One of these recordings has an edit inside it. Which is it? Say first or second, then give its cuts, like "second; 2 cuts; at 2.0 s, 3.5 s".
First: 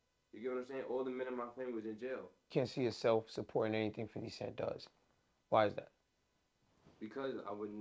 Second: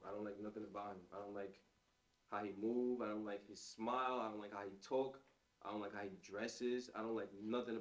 first; 1 cut; at 2.5 s